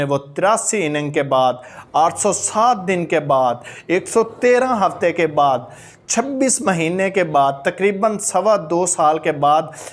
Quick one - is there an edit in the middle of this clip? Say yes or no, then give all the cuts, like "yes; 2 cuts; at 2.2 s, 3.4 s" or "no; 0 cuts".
no; 0 cuts